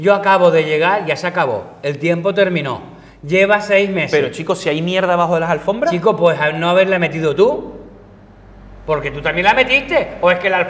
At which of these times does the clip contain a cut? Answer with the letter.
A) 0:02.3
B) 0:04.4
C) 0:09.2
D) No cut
D